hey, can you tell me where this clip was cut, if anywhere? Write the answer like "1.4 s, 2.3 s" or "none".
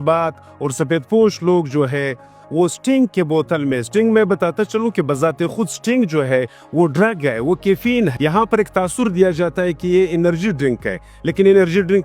none

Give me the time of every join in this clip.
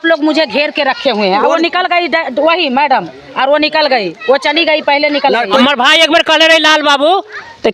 5.4 s

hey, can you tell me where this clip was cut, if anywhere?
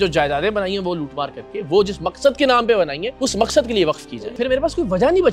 3.0 s, 4.1 s

